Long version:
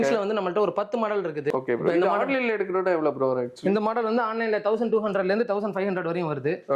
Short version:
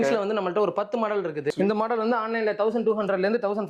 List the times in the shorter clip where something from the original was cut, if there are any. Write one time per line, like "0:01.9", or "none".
0:01.5

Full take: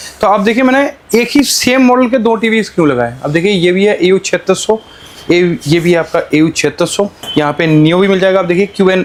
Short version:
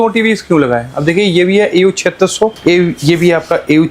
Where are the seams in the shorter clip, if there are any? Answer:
0:02.6

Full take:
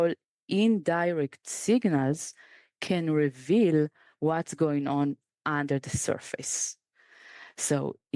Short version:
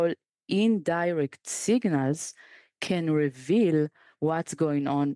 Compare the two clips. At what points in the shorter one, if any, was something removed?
none

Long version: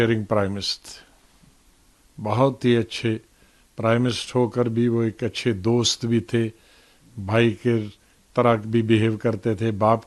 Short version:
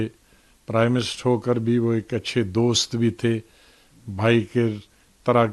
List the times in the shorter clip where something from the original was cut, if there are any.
none

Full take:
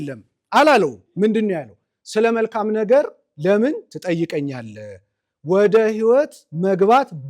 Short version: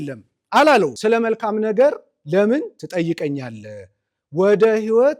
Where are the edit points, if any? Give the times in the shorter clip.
0:01.0

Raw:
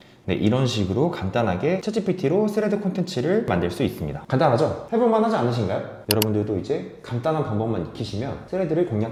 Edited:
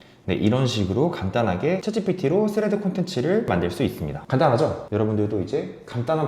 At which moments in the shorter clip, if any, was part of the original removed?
0:04.8

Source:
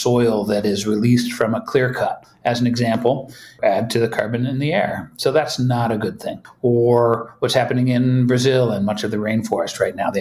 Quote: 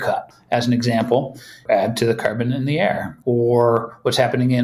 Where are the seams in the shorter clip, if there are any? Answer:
0:03.1

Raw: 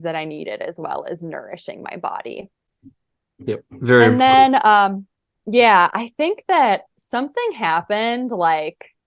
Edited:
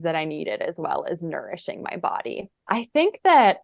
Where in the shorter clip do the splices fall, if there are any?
0:02.7

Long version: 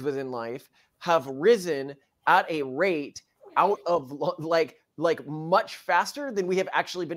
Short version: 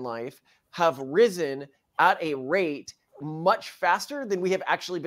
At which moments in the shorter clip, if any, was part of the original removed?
0:03.2

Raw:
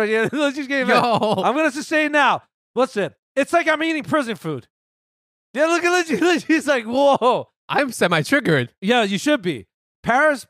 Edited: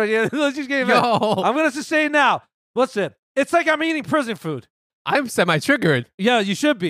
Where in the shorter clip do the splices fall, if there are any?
0:04.9

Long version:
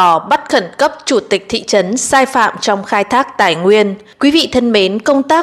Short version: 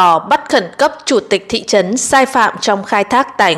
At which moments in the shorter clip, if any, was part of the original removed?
none

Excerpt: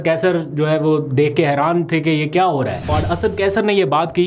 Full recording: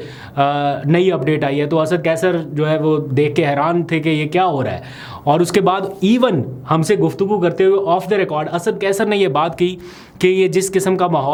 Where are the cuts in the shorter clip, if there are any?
0:02.9

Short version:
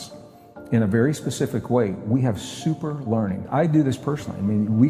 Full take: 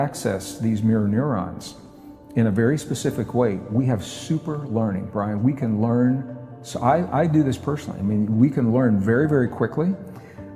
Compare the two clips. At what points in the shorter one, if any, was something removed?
0:03.5

